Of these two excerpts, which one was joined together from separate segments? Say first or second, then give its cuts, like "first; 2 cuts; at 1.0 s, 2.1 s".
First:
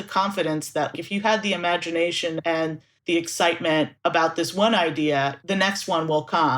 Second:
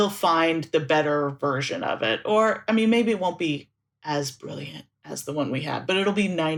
first; 4 cuts; at 0.9 s, 2.5 s, 3.9 s, 5.4 s